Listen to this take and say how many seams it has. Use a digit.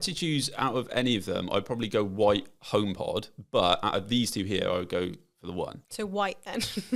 0